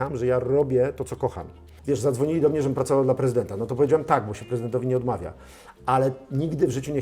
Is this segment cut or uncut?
cut